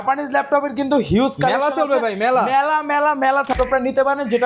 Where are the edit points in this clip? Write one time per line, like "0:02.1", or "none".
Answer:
0:03.5

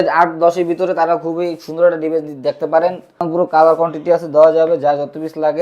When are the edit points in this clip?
0:03.2

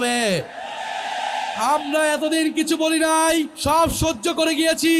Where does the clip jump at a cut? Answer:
0:03.5

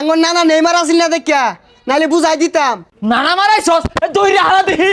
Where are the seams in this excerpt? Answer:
0:02.9

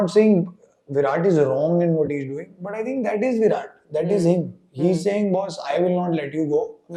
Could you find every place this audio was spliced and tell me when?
none

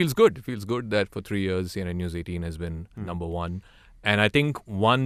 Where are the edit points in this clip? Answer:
none

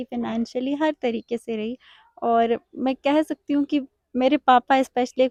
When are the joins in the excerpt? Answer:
none

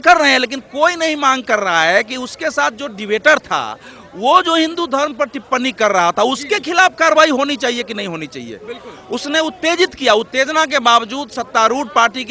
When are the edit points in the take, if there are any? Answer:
none

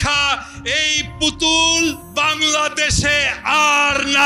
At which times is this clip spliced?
0:02.0

